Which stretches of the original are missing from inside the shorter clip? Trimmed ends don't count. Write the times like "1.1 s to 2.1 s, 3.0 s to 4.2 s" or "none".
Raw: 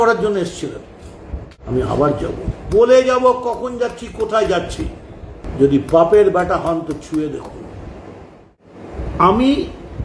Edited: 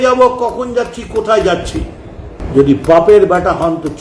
none